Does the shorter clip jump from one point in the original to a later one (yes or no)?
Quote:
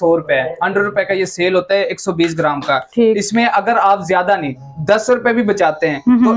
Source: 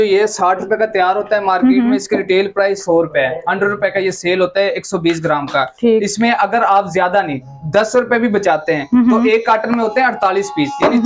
no